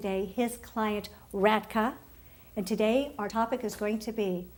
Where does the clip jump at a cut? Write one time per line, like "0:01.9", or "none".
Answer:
none